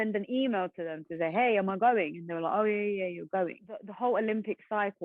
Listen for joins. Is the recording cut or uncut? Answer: cut